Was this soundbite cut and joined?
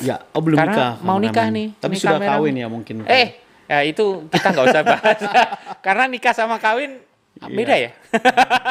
no; 0 cuts

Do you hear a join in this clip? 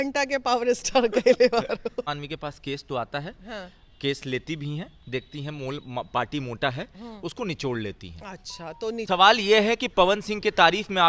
yes; 2 cuts; at 2.1 s, 9.0 s

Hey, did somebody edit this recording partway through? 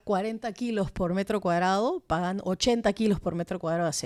no; 0 cuts

